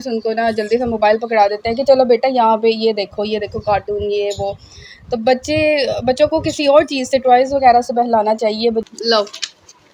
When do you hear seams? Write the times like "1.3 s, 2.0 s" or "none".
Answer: 8.8 s